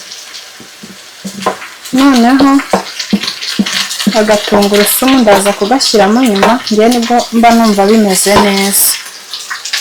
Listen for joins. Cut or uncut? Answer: uncut